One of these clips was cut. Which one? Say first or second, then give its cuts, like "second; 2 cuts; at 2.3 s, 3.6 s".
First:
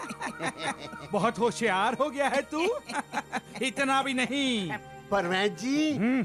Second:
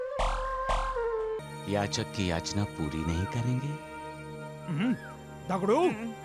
second; 1 cut; at 1.4 s